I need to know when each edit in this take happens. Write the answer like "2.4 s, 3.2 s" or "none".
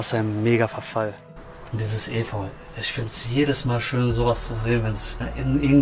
1.2 s